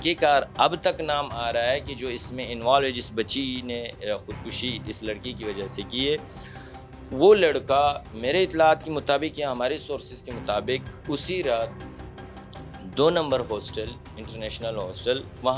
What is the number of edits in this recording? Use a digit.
0